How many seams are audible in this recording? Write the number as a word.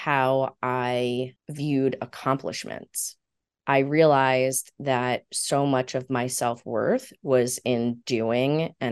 one